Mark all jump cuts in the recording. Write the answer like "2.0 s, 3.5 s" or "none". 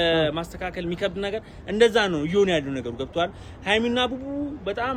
none